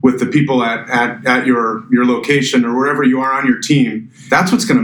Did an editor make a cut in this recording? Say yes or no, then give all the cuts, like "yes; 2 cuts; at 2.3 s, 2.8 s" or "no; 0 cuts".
no; 0 cuts